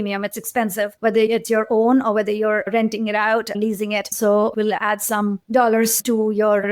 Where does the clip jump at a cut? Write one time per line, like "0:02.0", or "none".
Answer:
0:04.5